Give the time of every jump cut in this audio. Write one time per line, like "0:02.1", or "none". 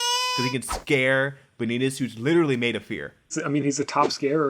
0:03.3